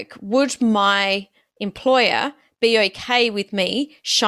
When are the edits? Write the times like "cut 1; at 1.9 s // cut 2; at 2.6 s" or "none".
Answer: none